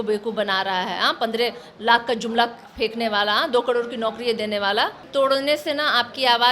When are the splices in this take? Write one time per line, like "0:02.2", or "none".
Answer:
0:05.0

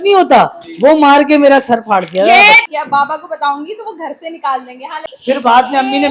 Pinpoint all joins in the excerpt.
0:02.7
0:05.1

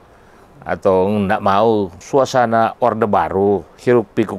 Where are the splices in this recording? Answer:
0:02.0

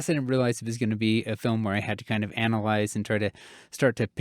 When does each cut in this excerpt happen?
none

